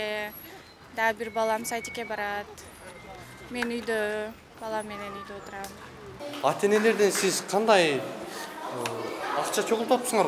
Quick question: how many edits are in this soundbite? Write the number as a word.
one